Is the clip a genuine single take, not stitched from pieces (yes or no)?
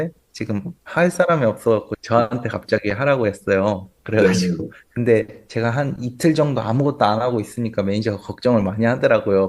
no